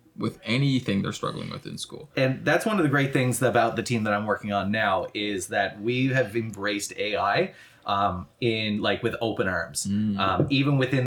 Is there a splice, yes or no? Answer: no